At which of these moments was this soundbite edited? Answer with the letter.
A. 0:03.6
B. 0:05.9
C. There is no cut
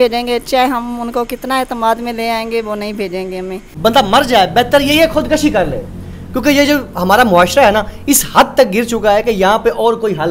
A